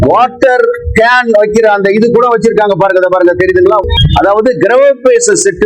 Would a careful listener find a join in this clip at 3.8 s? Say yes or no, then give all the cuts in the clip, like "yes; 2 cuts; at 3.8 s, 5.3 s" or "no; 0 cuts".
yes; 1 cut; at 3.8 s